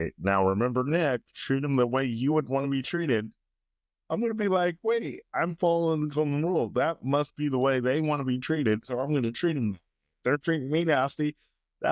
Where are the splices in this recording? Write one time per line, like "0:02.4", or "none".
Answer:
none

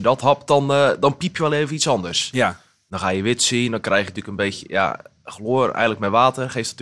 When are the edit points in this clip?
none

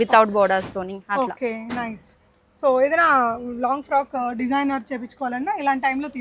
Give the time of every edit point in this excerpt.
none

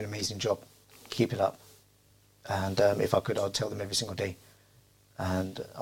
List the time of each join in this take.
none

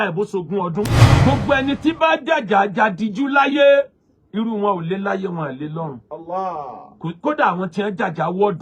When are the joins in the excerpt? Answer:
0:01.0

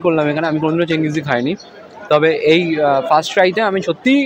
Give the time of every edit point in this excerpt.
none

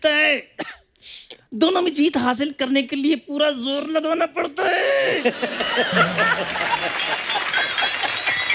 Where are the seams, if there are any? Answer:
none

